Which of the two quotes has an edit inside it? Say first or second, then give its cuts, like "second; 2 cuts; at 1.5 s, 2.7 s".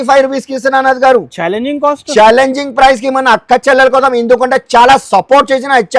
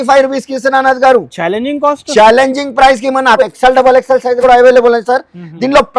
second; 1 cut; at 3.4 s